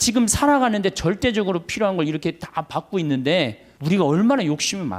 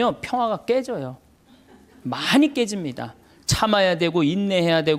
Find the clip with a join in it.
first; 1 cut; at 3.7 s

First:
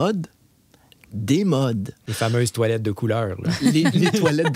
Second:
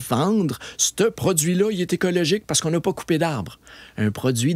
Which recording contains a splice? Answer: first; 1 cut; at 2.0 s

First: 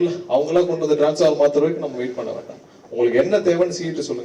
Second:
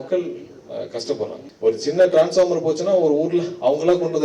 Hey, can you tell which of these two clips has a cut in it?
second; 1 cut; at 1.4 s

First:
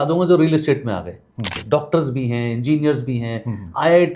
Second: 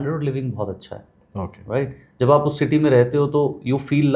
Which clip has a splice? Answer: first; 1 cut; at 1.6 s

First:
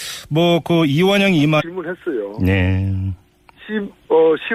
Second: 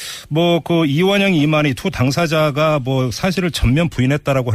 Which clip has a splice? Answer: second; 1 cut; at 1.6 s

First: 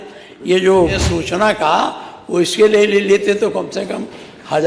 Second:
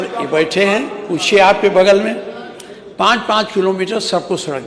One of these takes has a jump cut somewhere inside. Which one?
first; 1 cut; at 1.0 s

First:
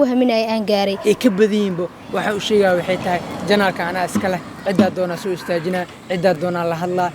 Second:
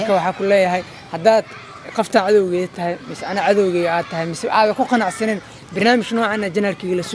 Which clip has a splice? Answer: first; 1 cut; at 1.0 s

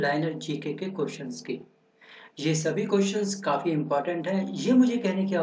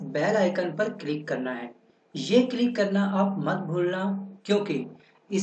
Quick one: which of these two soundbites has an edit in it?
second; 1 cut; at 4.3 s

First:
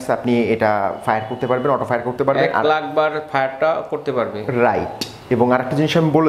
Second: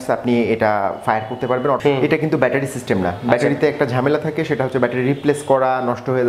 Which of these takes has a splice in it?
second; 1 cut; at 1.8 s

